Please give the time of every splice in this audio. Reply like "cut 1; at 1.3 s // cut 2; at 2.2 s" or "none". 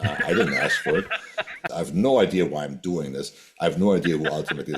cut 1; at 1.7 s